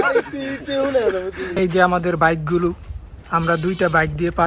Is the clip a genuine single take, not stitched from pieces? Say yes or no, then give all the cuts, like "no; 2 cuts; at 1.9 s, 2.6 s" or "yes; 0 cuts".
no; 1 cut; at 1.4 s